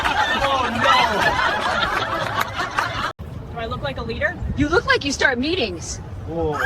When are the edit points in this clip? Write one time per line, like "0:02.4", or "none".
0:03.2